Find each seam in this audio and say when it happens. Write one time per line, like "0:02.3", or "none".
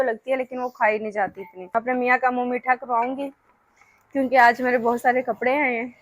0:01.7